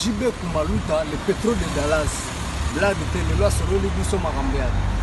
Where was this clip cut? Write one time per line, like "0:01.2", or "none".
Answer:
none